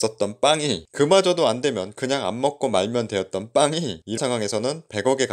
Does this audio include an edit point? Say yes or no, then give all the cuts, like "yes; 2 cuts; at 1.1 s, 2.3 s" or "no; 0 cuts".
yes; 1 cut; at 4.2 s